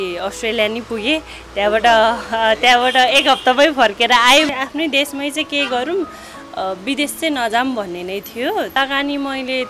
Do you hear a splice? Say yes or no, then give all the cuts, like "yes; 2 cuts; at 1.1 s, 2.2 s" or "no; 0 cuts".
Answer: yes; 2 cuts; at 4.5 s, 8.8 s